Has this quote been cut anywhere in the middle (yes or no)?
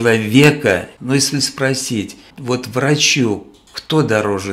yes